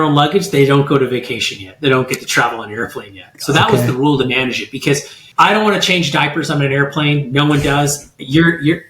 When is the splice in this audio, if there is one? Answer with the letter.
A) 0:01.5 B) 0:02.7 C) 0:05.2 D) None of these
C